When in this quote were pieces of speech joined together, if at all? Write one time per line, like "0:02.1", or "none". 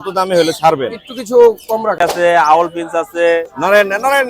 0:02.0